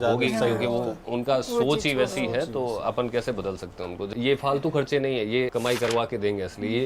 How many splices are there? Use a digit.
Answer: 1